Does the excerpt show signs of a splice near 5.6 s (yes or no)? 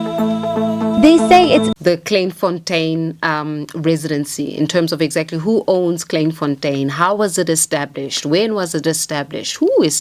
no